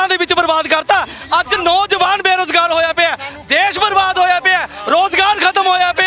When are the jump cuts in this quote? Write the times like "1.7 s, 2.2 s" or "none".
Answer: none